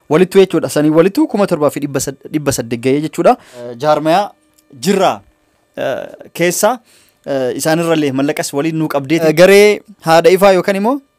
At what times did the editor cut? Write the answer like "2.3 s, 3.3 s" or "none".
3.6 s, 9.2 s